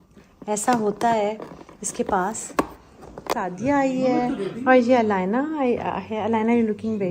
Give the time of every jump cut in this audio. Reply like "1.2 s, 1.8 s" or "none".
3.3 s